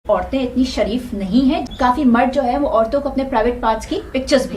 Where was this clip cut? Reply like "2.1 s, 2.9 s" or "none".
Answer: 1.7 s